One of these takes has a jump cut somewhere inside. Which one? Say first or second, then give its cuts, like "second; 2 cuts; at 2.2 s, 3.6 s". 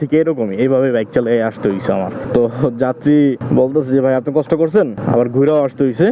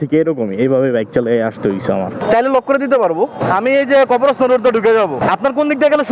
second; 3 cuts; at 2.2 s, 3.4 s, 5.2 s